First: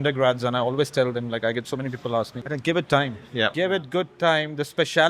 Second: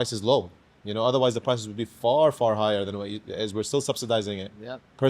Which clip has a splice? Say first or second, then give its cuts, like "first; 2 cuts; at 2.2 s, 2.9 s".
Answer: first; 2 cuts; at 2.4 s, 3.5 s